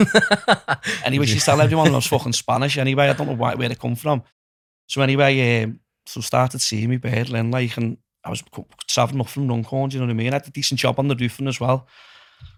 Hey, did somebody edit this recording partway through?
no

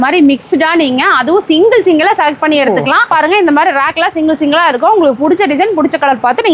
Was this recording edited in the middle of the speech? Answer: yes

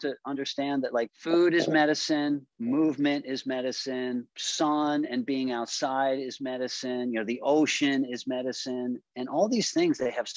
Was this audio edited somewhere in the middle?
no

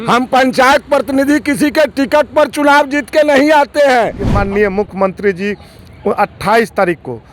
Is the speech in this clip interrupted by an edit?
yes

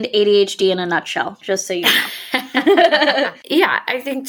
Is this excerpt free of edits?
no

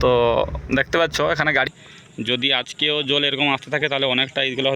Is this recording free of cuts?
no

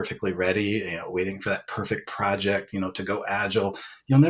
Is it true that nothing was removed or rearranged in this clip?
yes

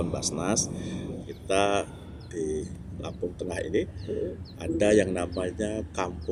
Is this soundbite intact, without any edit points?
yes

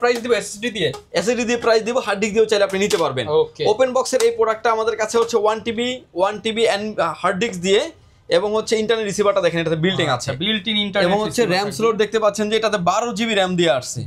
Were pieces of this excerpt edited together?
no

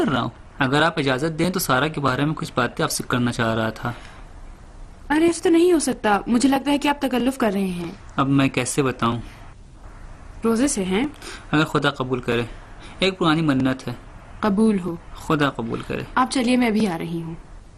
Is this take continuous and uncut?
no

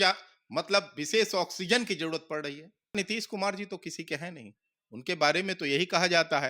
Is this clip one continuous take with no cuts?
no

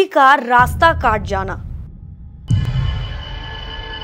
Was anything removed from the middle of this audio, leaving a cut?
yes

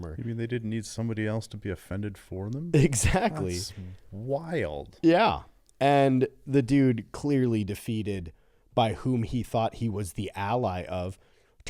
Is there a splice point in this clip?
no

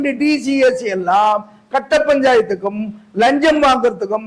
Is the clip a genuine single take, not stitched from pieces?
yes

